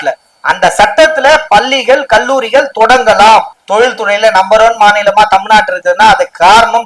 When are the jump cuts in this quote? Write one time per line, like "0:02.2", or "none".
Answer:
0:03.6